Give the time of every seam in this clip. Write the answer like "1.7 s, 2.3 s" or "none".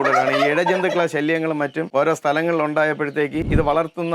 1.8 s